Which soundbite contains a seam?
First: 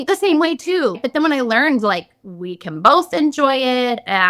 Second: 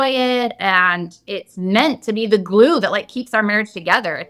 first; 1 cut; at 1.0 s

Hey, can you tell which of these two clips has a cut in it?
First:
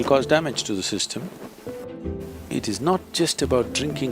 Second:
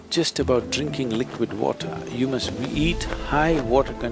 first; 1 cut; at 1.9 s

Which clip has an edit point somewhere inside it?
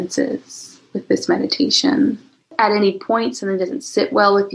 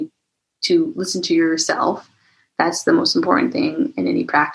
first; 1 cut; at 2.5 s

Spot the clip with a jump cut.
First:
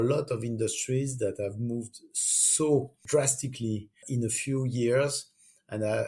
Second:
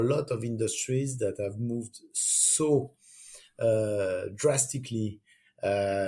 first; 2 cuts; at 3.0 s, 4.0 s

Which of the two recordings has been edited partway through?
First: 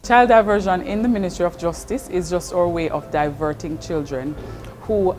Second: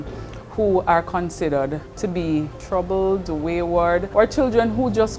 second; 3 cuts; at 1.9 s, 2.6 s, 4.1 s

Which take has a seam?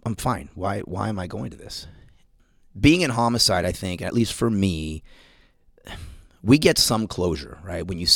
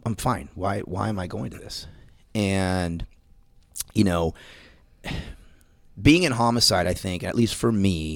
first; 1 cut; at 2.2 s

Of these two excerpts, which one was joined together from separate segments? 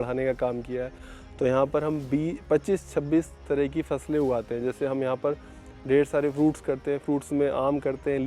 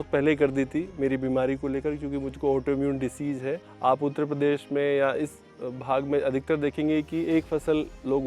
second; 1 cut; at 3.7 s

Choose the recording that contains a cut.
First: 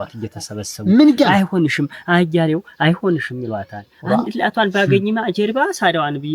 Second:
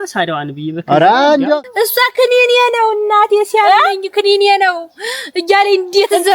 second; 1 cut; at 1.6 s

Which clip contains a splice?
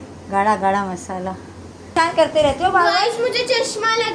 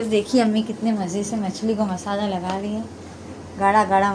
first; 1 cut; at 1.9 s

